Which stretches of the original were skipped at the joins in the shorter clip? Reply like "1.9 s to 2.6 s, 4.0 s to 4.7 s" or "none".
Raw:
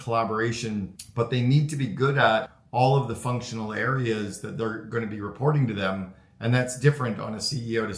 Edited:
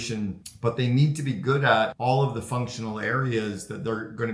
2.5 s to 2.7 s